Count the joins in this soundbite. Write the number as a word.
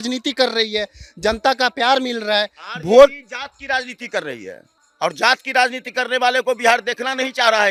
zero